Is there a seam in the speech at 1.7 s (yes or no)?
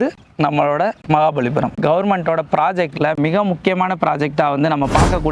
yes